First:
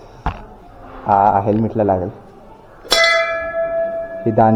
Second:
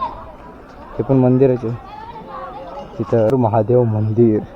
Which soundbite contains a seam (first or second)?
second